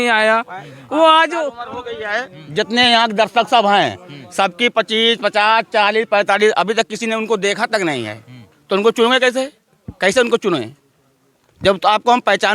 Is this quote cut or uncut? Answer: uncut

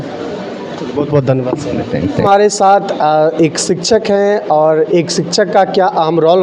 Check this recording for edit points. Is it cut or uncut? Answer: uncut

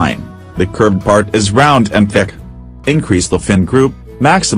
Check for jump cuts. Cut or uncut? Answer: cut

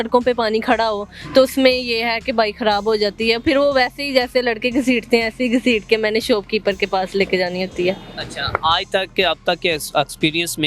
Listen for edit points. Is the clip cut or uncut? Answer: uncut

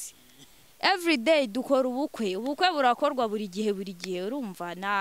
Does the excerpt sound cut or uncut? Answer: uncut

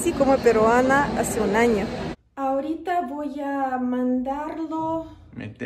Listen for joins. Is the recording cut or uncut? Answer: cut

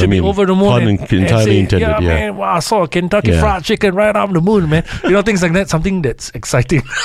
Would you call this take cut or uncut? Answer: uncut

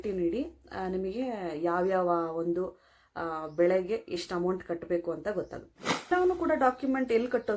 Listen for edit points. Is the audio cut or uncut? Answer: cut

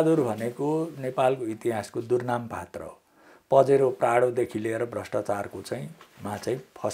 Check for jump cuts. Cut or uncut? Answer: uncut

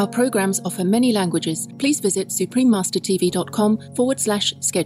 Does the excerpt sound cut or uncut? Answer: cut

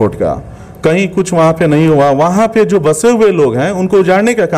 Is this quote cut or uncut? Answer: uncut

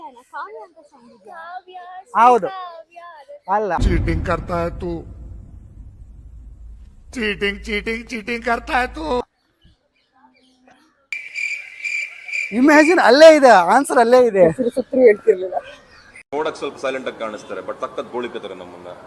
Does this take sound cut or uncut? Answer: uncut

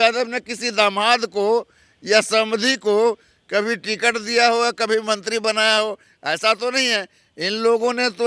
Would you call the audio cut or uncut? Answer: uncut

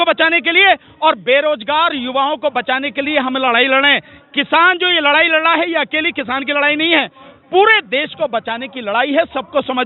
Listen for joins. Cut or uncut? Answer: uncut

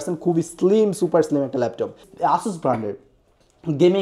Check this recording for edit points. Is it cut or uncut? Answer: cut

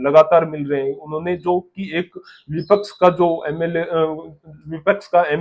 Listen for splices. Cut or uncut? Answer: uncut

